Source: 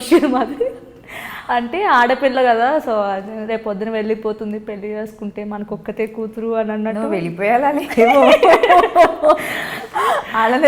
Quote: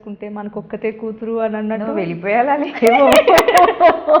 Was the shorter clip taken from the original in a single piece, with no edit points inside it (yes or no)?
yes